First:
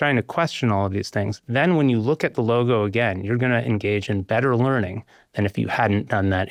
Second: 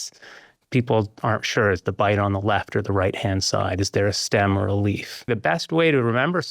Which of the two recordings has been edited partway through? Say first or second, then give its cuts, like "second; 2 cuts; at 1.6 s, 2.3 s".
second; 1 cut; at 5.2 s